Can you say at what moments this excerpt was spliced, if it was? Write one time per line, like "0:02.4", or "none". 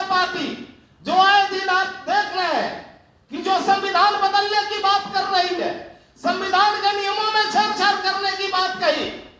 none

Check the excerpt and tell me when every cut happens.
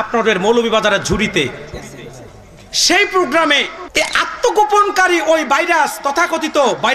0:03.8

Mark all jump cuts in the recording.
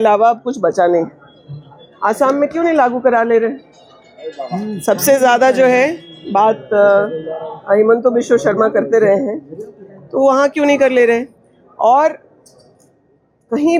none

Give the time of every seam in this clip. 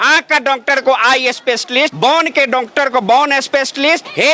none

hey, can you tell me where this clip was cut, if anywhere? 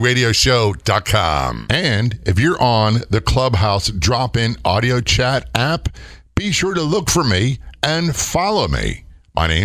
0:01.6

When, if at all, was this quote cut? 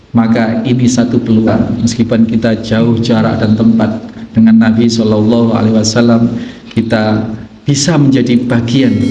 0:01.5

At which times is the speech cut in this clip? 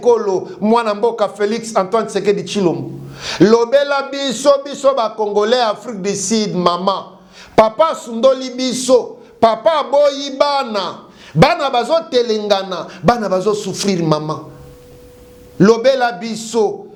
none

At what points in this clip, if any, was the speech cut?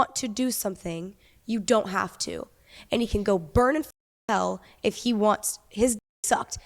none

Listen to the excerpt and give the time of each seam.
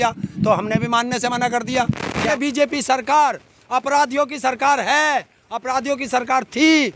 0:02.3

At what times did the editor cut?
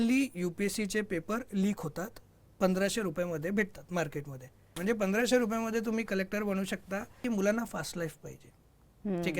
0:04.7
0:07.2

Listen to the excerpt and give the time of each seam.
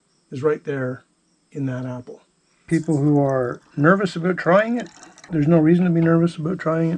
0:02.7
0:05.3

